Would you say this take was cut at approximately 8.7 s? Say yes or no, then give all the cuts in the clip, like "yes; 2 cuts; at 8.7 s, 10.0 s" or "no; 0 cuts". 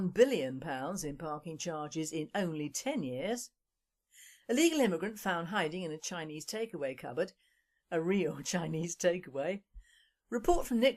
yes; 1 cut; at 8.7 s